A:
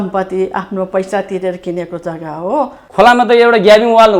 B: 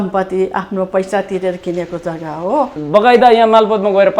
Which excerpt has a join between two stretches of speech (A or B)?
B